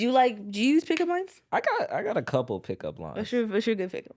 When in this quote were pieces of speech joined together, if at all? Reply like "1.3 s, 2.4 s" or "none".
1.4 s